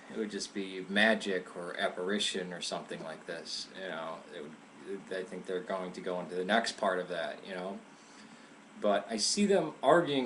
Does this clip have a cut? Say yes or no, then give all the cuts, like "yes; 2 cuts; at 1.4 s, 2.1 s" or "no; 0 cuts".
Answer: no; 0 cuts